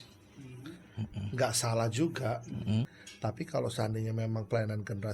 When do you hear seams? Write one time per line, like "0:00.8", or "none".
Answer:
0:02.9

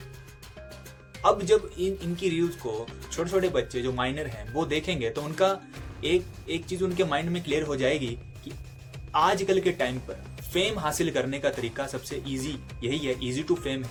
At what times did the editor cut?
none

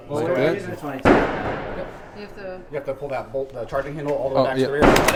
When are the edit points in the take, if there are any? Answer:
none

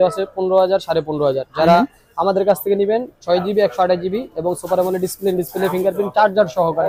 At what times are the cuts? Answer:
none

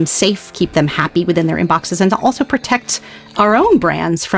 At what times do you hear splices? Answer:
none

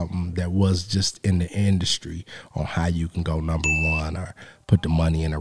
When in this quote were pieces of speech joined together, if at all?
none

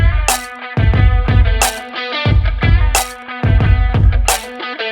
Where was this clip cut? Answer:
none

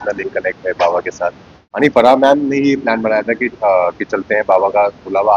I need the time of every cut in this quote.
0:01.8

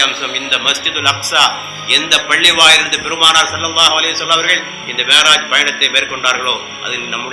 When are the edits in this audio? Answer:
none

